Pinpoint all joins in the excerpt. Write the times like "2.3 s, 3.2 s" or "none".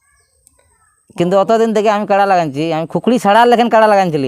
none